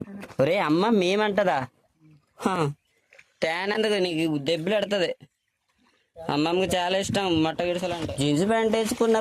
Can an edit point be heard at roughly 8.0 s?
yes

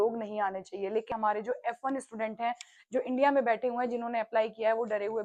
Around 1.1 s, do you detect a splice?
yes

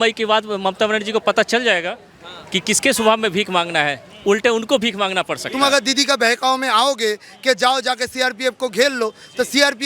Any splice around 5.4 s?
yes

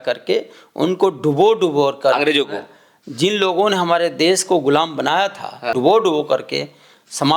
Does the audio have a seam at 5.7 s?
yes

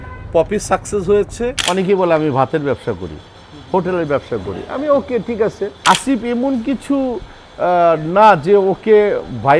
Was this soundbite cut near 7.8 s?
no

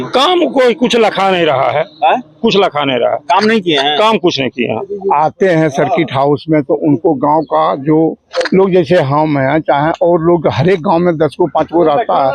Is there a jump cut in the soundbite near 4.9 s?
yes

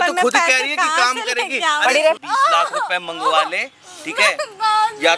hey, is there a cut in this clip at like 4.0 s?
no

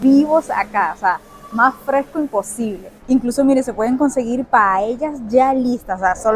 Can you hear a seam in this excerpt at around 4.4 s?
yes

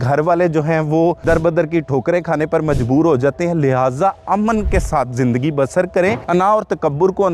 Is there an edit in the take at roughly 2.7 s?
no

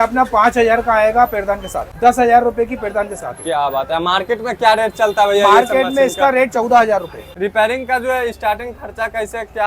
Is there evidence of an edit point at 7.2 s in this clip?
yes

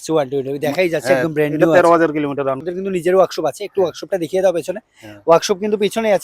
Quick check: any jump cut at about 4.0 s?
no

